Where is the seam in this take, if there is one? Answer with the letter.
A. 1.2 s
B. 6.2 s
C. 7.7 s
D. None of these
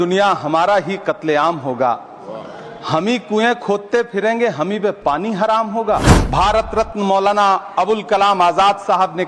B